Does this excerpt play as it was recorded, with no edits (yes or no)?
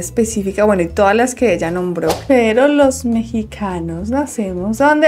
no